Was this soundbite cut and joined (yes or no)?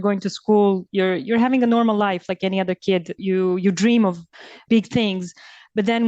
yes